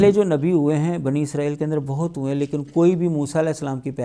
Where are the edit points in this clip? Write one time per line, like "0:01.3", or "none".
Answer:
none